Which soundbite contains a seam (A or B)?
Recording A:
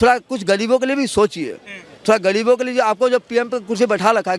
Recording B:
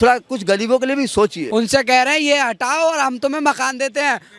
B